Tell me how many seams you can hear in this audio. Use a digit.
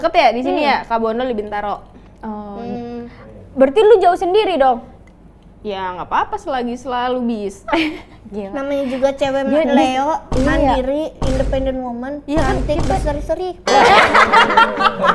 0